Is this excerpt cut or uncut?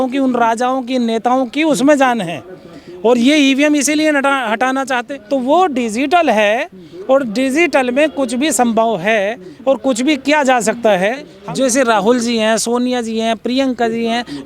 cut